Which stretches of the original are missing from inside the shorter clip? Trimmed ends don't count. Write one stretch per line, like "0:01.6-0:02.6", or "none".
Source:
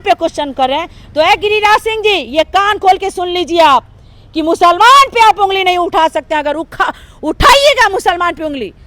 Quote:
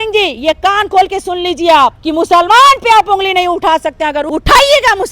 0:03.9-0:04.3
0:06.6-0:07.2